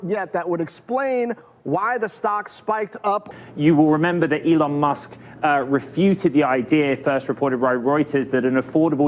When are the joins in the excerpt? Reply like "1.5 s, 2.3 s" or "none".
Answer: 3.3 s